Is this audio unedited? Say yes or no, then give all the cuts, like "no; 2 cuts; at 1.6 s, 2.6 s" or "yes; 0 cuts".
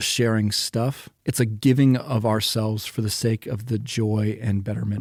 yes; 0 cuts